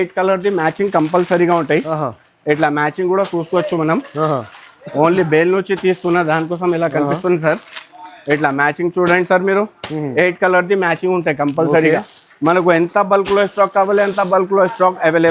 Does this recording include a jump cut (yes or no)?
no